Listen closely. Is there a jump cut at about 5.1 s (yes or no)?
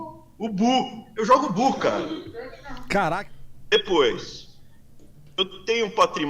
no